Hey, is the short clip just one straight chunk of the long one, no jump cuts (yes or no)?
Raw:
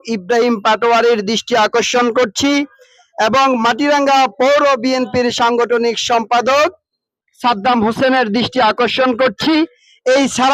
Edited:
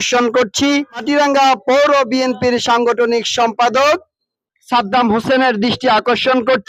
no